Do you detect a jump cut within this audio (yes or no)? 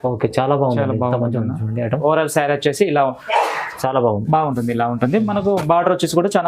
yes